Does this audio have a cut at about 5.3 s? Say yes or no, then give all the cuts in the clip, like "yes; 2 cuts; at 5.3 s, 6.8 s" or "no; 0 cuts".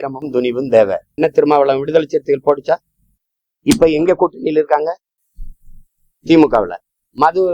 no; 1 cut; at 1.2 s